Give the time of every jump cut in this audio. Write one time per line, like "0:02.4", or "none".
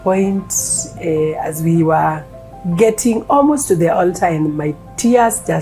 none